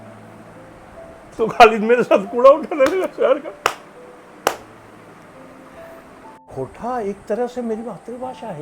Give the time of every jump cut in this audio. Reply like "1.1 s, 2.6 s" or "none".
6.5 s